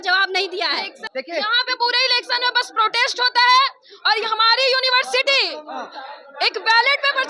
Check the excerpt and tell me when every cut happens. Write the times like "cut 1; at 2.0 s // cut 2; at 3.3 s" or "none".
cut 1; at 1.0 s

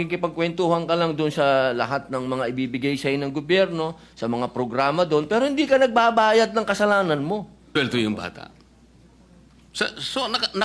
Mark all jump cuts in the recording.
cut 1; at 7.7 s

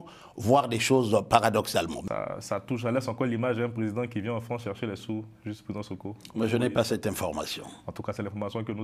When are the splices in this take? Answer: cut 1; at 2.0 s

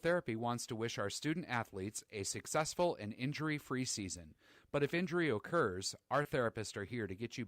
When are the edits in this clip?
cut 1; at 6.3 s

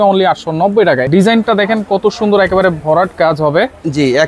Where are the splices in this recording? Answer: cut 1; at 1.0 s

